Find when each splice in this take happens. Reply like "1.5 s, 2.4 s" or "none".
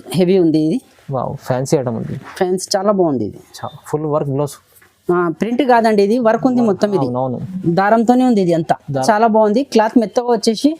9.0 s